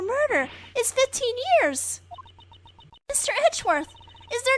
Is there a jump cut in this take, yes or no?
yes